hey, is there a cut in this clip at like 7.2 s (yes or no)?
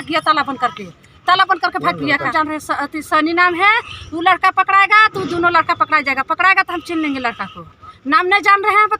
no